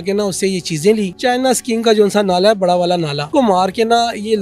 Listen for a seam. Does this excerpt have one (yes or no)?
yes